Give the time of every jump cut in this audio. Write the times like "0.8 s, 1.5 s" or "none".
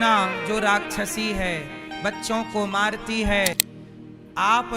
3.7 s